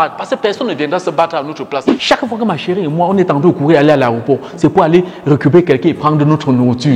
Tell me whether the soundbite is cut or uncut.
cut